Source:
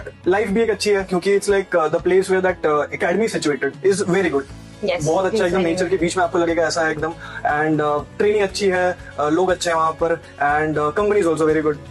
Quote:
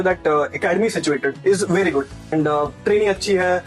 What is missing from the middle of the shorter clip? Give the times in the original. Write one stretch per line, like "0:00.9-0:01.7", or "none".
0:04.7-0:07.6